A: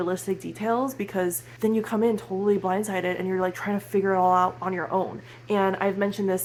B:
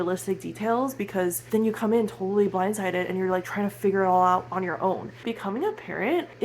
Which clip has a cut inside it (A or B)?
B